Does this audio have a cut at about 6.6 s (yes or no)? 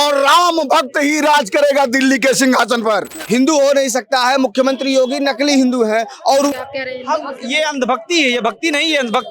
yes